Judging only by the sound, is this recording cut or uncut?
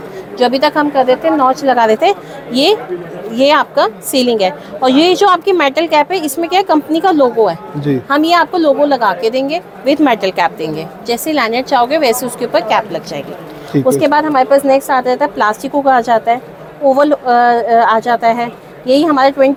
uncut